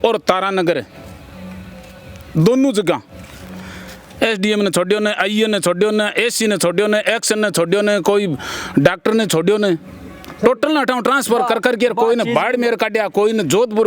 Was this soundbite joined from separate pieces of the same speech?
no; 0 cuts

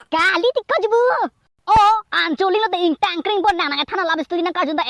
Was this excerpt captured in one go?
yes; 0 cuts

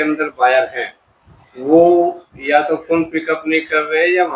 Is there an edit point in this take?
no; 0 cuts

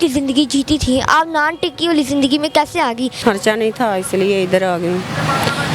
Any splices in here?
yes; 1 cut; at 3.2 s

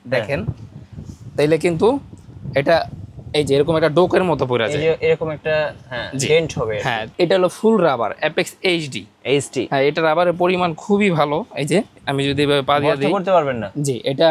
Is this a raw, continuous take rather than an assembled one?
no; 2 cuts; at 7.1 s, 9.7 s

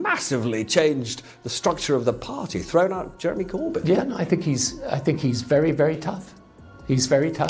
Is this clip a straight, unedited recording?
yes; 0 cuts

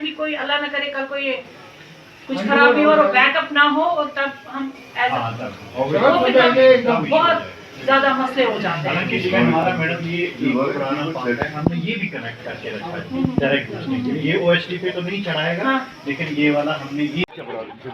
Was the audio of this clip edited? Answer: no; 0 cuts

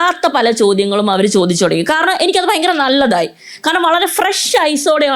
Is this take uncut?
yes; 0 cuts

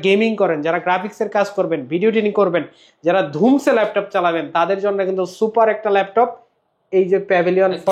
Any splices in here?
no; 0 cuts

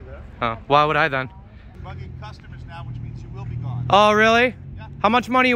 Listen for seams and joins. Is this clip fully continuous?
no; 1 cut; at 1.8 s

